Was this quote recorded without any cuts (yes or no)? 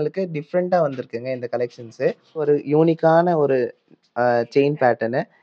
no